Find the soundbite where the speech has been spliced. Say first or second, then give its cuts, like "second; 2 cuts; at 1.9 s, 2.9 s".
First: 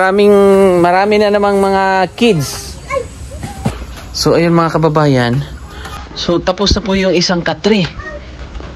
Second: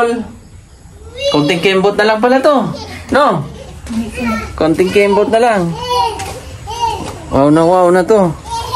first; 1 cut; at 3.8 s